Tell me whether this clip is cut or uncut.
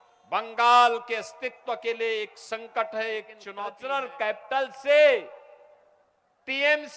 cut